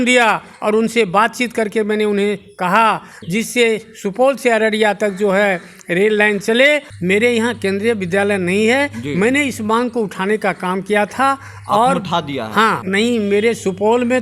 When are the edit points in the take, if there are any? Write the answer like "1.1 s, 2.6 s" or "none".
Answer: 3.1 s, 6.9 s, 12.8 s